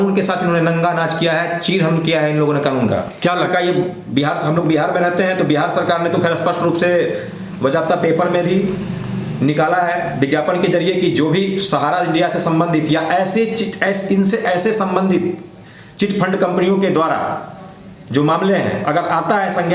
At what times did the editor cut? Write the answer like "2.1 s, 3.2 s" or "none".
3.4 s